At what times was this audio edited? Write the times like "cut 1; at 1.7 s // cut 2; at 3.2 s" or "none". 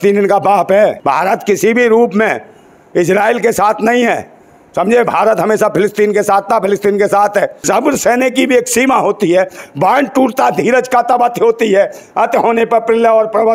cut 1; at 1.0 s // cut 2; at 7.6 s